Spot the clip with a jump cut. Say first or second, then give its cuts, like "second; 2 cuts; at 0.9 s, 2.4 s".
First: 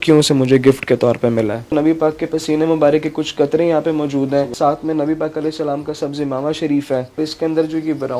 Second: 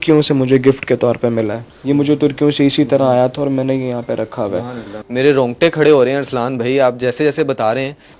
first; 3 cuts; at 1.6 s, 4.5 s, 7.2 s